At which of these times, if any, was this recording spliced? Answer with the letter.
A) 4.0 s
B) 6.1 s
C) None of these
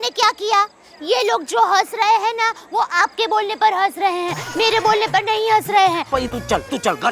B